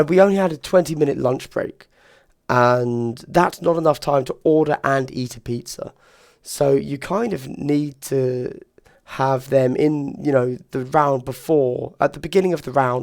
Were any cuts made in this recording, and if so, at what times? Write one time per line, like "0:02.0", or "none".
none